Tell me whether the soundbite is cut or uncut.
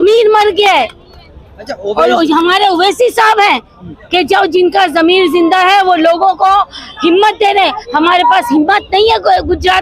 uncut